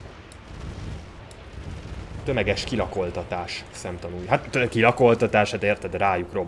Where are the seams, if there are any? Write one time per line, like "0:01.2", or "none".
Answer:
none